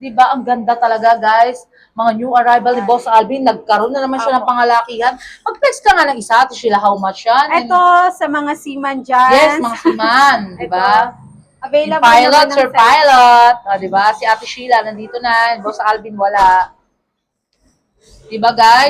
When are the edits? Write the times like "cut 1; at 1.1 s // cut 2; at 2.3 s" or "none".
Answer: none

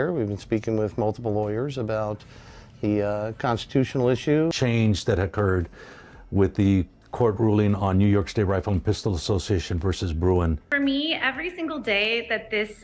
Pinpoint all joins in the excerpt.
cut 1; at 4.5 s // cut 2; at 10.7 s

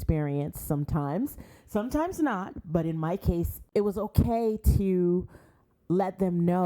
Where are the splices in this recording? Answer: cut 1; at 3.5 s

